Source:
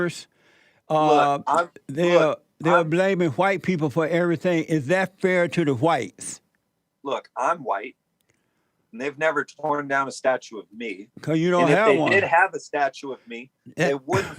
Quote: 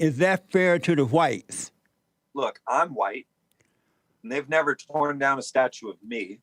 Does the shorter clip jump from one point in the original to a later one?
no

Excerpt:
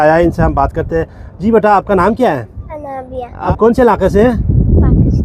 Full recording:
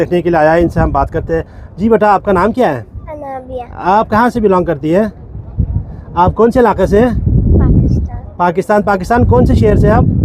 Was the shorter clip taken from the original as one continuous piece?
no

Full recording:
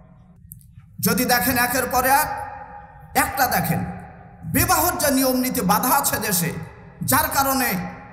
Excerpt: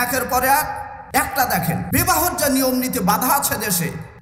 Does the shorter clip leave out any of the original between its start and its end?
yes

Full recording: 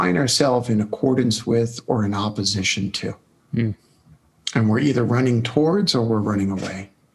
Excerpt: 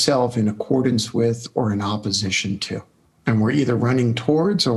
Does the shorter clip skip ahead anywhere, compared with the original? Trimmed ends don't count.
yes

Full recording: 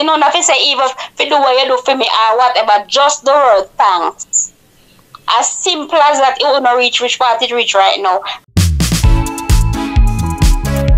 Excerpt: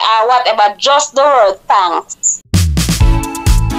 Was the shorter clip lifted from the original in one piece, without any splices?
no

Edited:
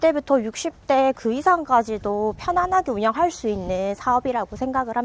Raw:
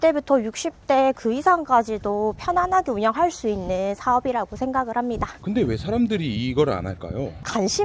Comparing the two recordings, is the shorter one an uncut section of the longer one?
yes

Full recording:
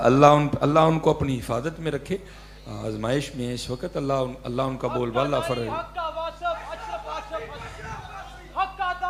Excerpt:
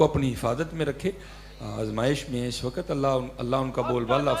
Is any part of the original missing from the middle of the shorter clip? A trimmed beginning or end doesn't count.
no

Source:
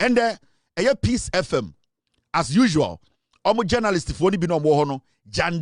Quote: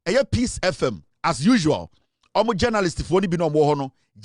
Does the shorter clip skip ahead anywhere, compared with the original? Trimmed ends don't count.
yes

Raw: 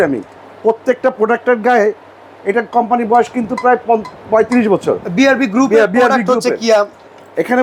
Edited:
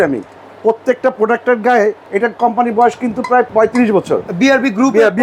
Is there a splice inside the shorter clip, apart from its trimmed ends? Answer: yes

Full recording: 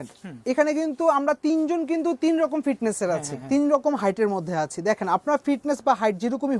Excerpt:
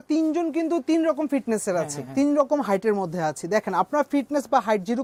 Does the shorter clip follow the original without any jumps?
yes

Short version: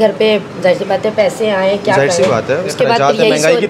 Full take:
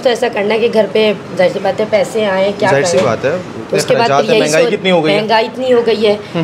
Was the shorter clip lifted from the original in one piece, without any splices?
no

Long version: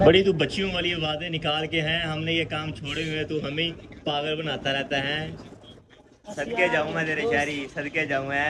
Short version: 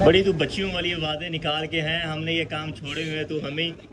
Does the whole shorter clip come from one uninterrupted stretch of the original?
yes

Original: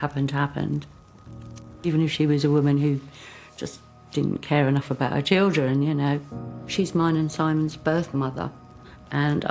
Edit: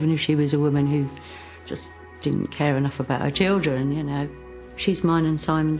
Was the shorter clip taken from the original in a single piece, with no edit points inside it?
yes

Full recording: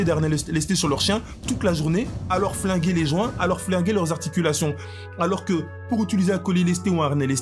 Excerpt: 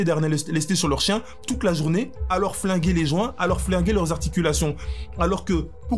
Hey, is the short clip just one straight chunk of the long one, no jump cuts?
yes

